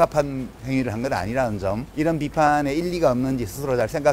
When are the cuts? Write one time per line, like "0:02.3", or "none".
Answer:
0:01.9